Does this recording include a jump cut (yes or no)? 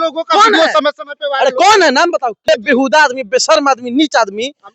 yes